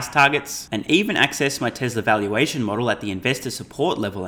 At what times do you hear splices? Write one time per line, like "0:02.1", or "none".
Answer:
none

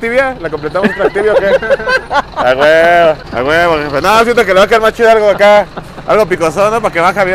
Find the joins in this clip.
0:03.3

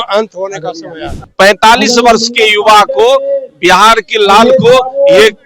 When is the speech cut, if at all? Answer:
0:01.3

